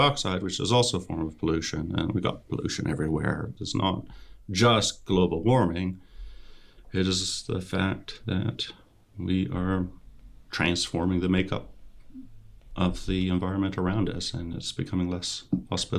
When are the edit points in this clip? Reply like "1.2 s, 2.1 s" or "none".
3.5 s